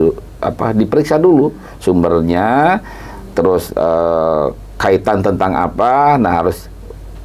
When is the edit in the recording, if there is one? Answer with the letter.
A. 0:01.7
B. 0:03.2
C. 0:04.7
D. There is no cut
D